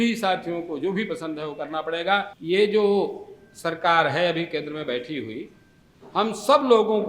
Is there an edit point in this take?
yes; 1 cut; at 2.3 s

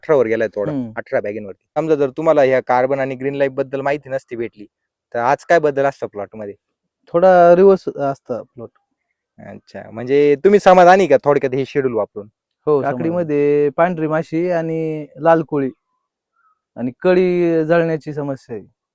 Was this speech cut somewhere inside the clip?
yes; 2 cuts; at 1.8 s, 12.8 s

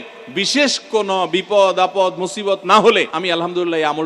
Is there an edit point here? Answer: yes; 1 cut; at 3.1 s

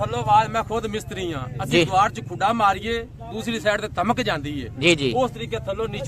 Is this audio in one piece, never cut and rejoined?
yes; 0 cuts

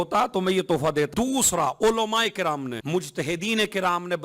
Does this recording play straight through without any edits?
no; 2 cuts; at 1.1 s, 2.8 s

